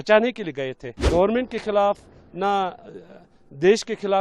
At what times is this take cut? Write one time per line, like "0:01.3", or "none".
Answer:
0:01.0

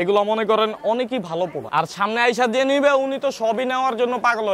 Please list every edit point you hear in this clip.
0:01.6

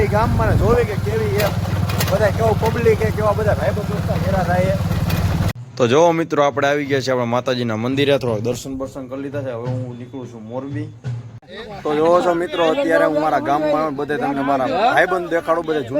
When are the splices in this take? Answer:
0:05.5
0:11.4

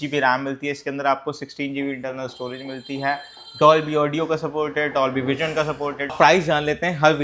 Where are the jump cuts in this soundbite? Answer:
0:06.0

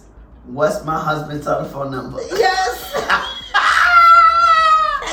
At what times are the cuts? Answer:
none

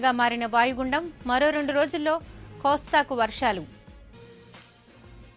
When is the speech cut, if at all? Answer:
none

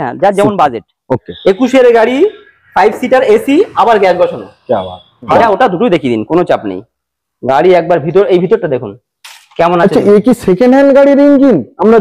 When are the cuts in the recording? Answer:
0:01.3
0:05.3

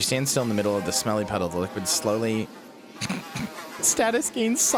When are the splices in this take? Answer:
none

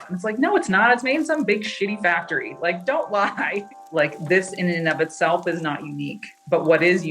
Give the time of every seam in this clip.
0:03.8

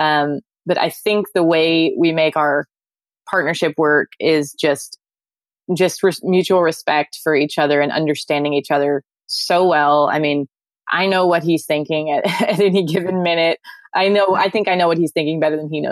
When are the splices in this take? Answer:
none

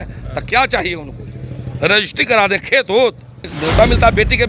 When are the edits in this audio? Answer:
0:03.5

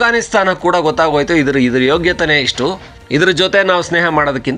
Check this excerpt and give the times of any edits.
0:02.9

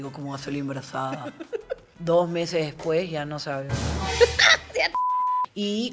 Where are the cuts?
0:01.9
0:05.0

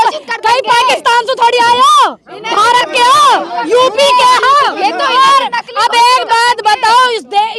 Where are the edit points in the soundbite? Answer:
none

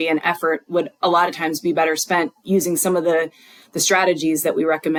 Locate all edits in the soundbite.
none

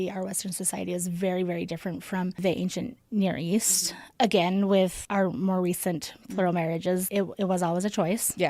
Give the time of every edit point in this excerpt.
none

